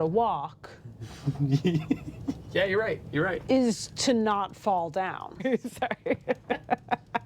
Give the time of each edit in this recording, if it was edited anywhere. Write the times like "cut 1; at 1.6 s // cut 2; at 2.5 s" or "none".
cut 1; at 5.4 s